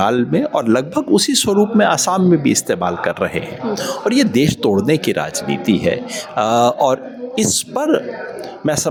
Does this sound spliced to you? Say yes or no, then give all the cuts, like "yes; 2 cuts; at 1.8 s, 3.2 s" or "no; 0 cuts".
no; 0 cuts